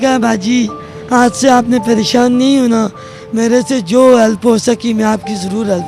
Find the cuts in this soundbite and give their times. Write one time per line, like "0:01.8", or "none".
none

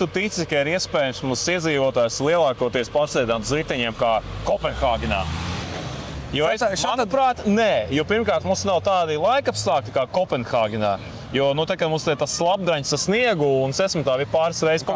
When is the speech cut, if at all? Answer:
none

